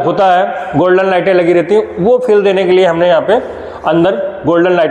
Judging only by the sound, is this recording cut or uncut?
uncut